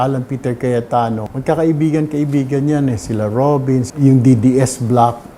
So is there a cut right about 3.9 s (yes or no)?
yes